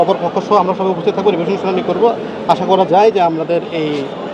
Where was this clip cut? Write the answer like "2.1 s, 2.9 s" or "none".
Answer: none